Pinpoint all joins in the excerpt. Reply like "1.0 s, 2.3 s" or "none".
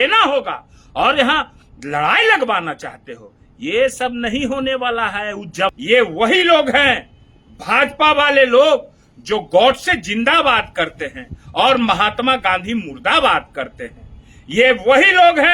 5.7 s